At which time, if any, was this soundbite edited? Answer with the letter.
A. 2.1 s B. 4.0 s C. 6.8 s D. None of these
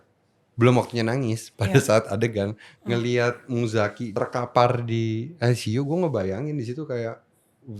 B